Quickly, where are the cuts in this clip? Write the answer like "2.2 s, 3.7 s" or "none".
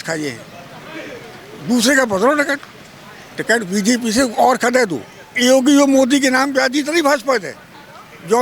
5.3 s